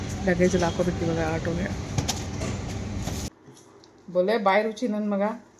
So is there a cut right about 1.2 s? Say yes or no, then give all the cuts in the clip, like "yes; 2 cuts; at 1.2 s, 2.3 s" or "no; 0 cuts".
no; 1 cut; at 3.4 s